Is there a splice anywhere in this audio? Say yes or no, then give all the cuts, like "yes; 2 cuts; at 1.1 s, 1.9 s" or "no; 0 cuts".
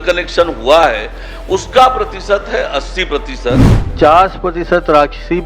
yes; 1 cut; at 3.8 s